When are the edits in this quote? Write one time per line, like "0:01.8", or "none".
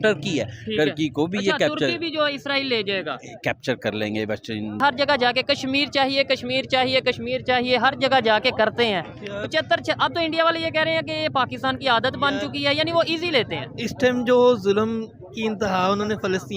0:04.8